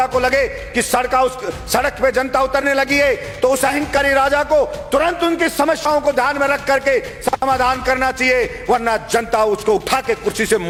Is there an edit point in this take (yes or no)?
no